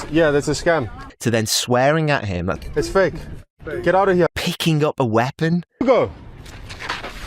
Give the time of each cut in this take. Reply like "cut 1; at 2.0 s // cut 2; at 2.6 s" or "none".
cut 1; at 2.5 s // cut 2; at 4.3 s